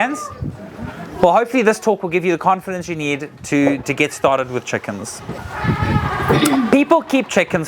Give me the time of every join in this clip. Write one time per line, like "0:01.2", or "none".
0:05.5